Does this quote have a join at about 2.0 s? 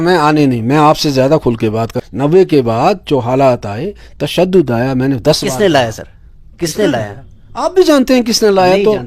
yes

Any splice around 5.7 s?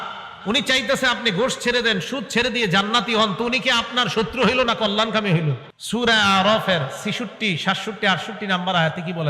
yes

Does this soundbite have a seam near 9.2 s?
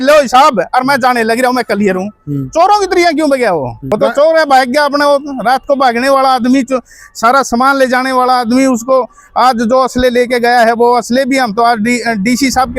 no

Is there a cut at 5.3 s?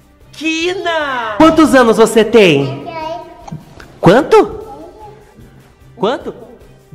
yes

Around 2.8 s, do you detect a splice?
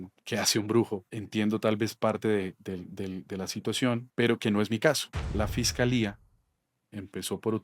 no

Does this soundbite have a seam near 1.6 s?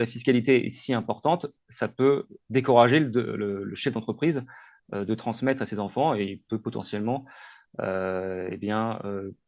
no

